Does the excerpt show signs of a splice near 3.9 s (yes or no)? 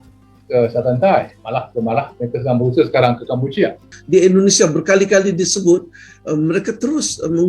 yes